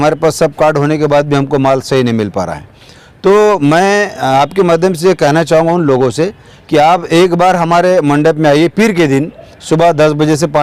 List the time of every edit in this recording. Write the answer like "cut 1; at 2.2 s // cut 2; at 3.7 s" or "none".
none